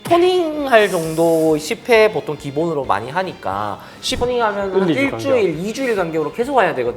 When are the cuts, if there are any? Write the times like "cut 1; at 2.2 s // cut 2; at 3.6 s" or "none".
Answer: cut 1; at 4.1 s